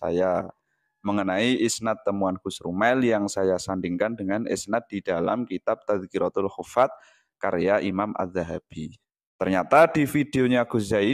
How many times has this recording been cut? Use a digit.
0